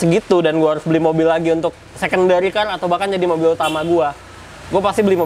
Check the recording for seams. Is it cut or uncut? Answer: uncut